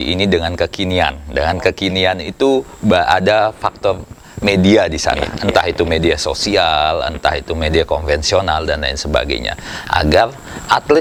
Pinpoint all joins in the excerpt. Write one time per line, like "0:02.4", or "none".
none